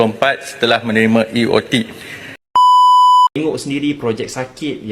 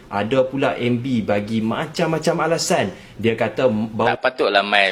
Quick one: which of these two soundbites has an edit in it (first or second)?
first